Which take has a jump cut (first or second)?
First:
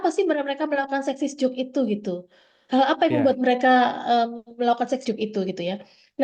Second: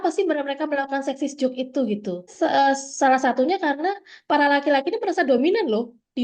second